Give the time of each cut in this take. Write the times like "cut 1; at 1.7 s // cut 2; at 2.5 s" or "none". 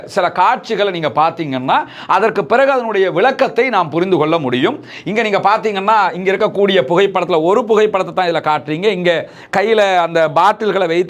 none